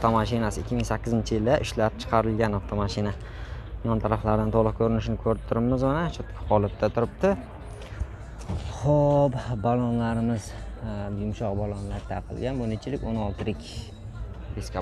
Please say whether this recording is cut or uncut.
uncut